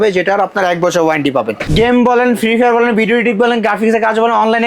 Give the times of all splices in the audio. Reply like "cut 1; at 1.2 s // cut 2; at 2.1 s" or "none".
cut 1; at 1.6 s